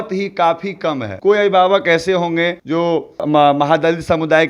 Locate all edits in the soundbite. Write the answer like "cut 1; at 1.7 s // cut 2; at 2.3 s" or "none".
cut 1; at 1.1 s // cut 2; at 2.7 s